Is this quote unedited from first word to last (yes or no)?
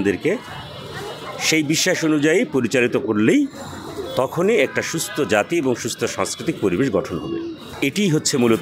yes